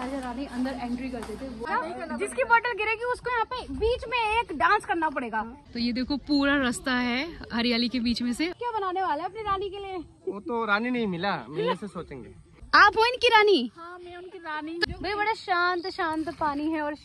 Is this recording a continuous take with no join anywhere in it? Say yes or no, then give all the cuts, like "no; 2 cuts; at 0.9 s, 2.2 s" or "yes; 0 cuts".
no; 5 cuts; at 1.7 s, 5.6 s, 8.6 s, 12.6 s, 14.9 s